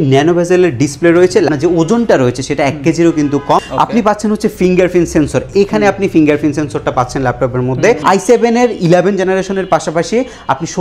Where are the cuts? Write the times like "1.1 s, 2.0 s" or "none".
1.5 s, 3.7 s, 8.0 s